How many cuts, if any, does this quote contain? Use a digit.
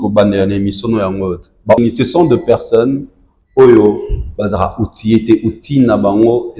1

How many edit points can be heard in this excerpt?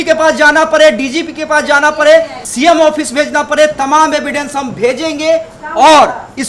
1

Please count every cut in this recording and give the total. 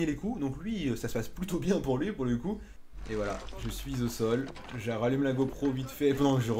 1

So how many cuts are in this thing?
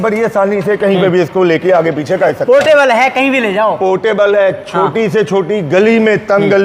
0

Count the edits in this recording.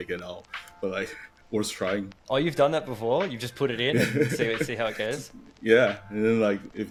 0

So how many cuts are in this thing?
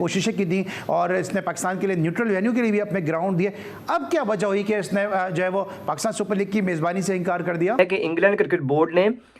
1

